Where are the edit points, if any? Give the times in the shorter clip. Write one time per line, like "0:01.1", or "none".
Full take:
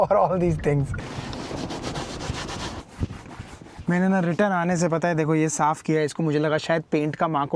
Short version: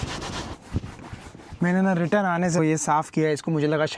0:02.6